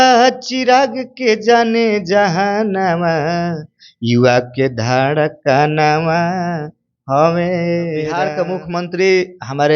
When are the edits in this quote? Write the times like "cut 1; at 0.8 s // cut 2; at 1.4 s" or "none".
cut 1; at 8.3 s